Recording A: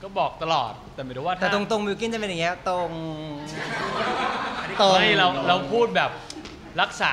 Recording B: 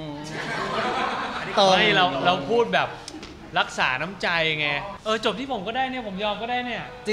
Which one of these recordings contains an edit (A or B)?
B